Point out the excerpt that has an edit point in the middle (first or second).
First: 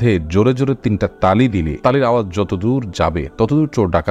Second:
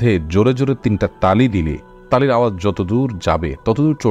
first